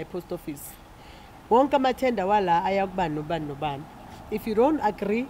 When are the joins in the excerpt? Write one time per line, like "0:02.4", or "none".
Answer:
none

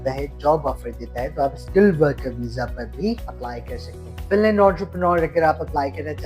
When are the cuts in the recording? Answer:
0:03.8

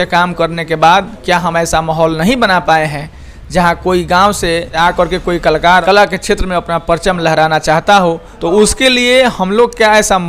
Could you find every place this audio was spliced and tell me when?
0:04.7
0:05.8
0:08.3

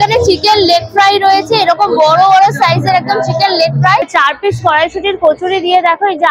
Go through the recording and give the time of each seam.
0:04.1

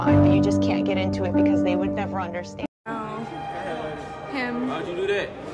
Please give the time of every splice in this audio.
0:02.9

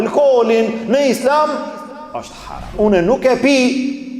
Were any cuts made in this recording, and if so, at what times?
0:02.7

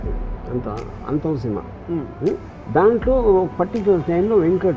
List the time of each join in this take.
0:02.5

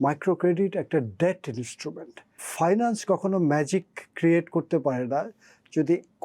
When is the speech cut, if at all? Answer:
0:02.4

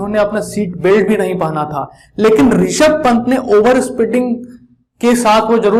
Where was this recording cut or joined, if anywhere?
none

